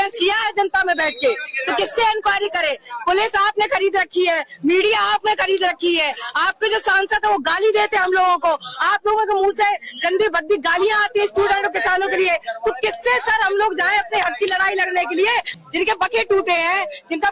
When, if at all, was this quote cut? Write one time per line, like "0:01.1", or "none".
0:15.6